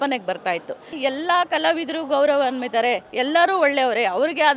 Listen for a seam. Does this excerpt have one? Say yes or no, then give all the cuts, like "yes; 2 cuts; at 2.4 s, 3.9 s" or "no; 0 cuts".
yes; 1 cut; at 0.9 s